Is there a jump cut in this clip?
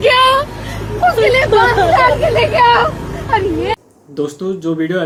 no; 0 cuts

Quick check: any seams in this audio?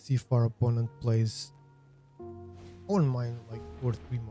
yes; 2 cuts; at 1.3 s, 2.9 s

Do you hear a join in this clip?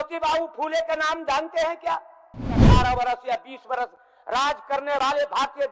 yes; 1 cut; at 2.6 s

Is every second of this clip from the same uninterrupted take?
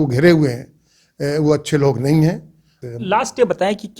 no; 1 cut; at 2.8 s

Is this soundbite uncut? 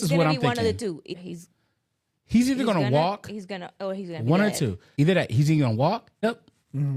no; 3 cuts; at 1.1 s, 4.8 s, 6.2 s

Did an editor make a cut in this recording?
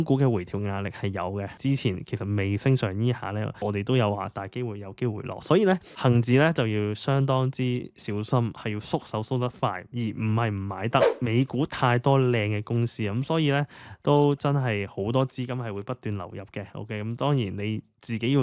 yes; 4 cuts; at 1.6 s, 3.6 s, 5.9 s, 11.1 s

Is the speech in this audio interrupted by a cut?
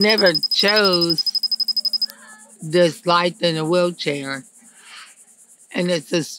no; 0 cuts

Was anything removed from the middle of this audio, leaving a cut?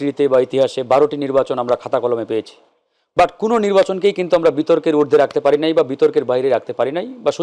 no; 0 cuts

